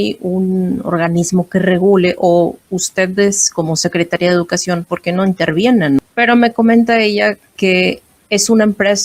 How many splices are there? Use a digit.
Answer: 2